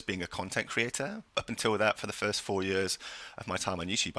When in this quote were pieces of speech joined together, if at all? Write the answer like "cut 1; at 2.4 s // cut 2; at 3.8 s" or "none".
cut 1; at 1.2 s

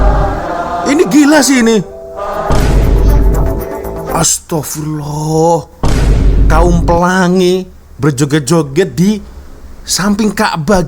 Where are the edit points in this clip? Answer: none

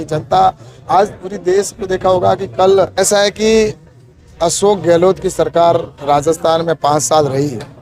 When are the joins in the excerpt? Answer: cut 1; at 2.9 s

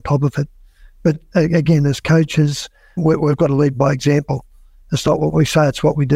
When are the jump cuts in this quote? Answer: cut 1; at 3.0 s

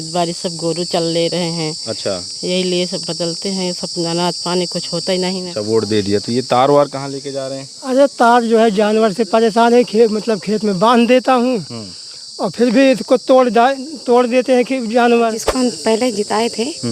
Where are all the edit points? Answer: cut 1; at 5.5 s // cut 2; at 15.4 s

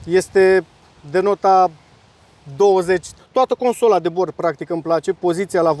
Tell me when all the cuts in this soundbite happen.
cut 1; at 3.1 s

